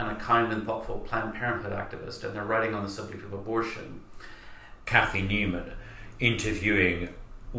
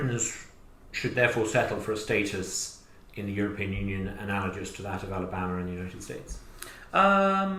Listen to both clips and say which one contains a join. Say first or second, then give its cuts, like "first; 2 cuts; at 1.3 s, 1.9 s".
first; 1 cut; at 4.7 s